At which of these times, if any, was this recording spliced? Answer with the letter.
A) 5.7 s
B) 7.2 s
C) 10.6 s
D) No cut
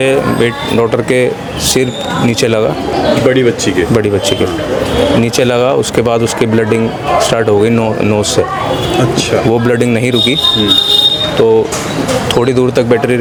D